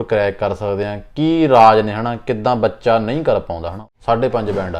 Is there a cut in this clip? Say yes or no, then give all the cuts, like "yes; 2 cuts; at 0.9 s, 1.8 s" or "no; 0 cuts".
yes; 1 cut; at 3.8 s